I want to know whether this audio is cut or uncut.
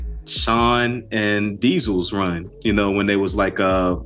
uncut